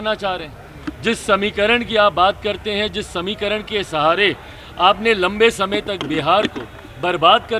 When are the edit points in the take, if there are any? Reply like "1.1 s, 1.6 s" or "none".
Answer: none